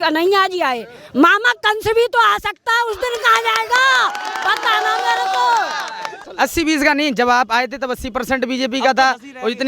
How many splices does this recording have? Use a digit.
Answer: 1